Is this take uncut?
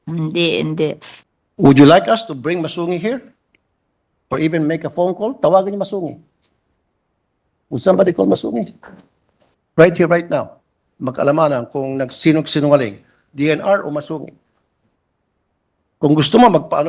no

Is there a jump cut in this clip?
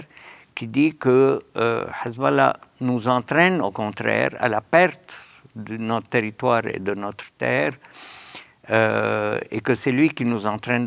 no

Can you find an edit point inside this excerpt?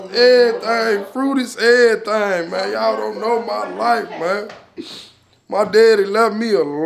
no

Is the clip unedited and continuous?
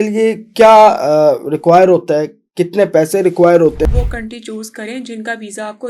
no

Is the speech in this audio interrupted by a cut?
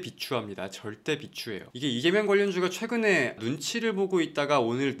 yes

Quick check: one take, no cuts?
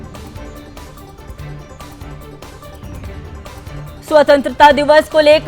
no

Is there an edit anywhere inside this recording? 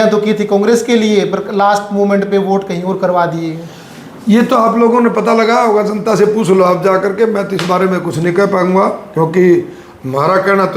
no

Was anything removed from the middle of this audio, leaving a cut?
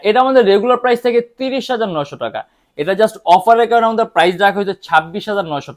no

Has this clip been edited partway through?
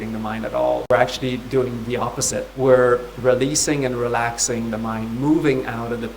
yes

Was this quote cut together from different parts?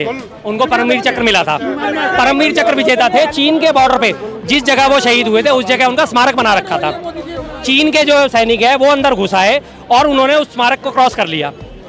no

